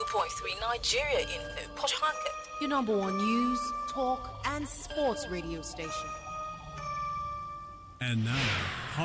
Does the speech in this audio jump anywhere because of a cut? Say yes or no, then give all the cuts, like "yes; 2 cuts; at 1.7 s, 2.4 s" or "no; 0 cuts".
yes; 1 cut; at 7.8 s